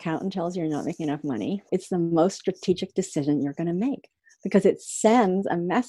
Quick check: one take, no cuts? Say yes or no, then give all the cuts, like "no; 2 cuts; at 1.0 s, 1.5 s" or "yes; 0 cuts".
no; 1 cut; at 1.7 s